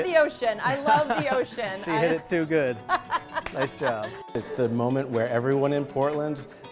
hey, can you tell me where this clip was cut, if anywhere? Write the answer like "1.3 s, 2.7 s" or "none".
4.3 s